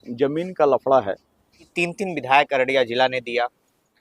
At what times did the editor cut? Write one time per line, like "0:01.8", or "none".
0:01.7